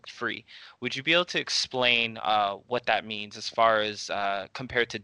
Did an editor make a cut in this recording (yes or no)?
no